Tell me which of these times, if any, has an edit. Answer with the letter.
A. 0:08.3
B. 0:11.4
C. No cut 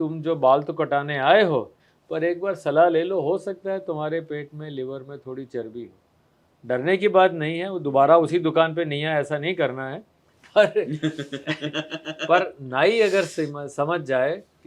C